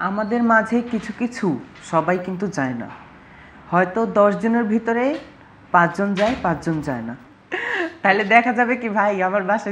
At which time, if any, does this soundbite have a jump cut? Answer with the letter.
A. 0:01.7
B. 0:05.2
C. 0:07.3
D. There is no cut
C